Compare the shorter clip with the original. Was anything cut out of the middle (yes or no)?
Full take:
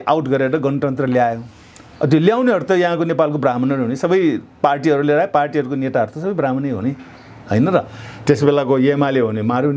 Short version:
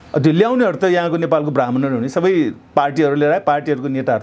no